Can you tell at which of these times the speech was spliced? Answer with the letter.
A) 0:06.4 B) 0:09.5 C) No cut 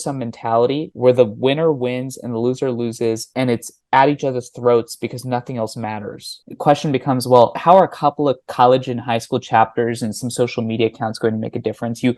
A